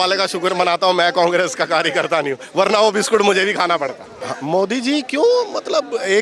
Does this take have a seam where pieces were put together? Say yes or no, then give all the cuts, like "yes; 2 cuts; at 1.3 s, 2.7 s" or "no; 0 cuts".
yes; 1 cut; at 4.1 s